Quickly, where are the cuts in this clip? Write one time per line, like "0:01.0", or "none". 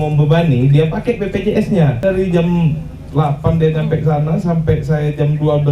0:02.0